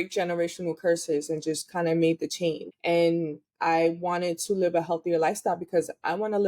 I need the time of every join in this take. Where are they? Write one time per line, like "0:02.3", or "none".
0:02.7